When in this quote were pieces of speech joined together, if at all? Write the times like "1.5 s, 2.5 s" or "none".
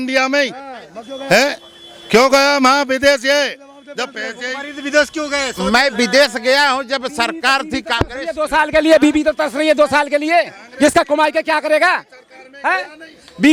none